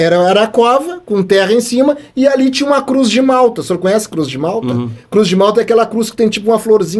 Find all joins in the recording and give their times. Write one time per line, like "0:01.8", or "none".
none